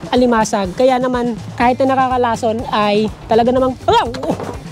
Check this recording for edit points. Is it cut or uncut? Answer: cut